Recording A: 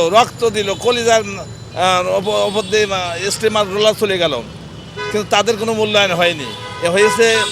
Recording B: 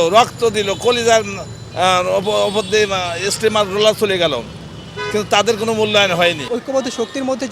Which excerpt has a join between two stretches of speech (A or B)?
B